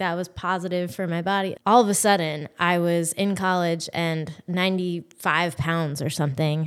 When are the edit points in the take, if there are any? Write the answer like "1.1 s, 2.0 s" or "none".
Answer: 1.5 s